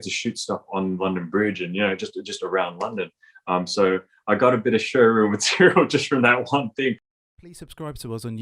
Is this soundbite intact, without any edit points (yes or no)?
no